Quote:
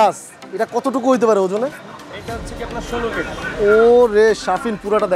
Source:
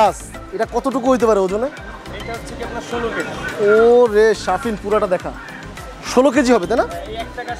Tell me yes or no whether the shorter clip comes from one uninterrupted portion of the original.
yes